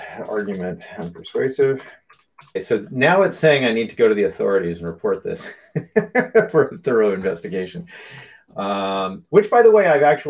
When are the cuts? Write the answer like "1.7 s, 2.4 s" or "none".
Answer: 2.6 s